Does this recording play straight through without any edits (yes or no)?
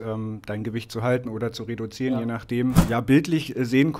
no